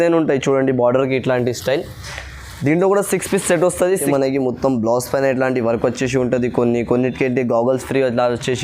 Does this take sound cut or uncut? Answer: cut